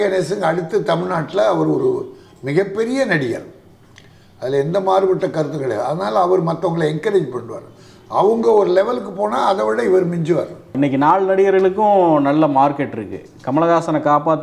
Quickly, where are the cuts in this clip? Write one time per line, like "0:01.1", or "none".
0:10.7